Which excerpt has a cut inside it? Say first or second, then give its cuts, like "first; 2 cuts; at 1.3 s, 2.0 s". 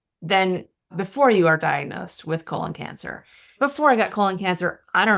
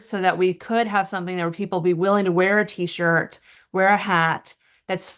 first; 2 cuts; at 0.9 s, 3.6 s